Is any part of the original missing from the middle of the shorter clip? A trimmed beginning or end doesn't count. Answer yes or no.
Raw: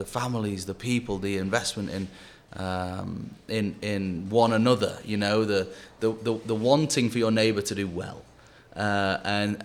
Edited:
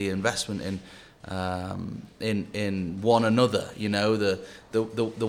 no